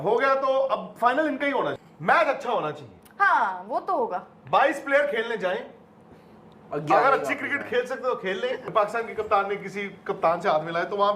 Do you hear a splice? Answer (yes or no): yes